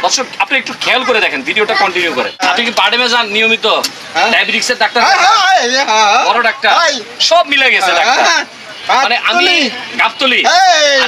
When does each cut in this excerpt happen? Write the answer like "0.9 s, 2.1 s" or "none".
2.4 s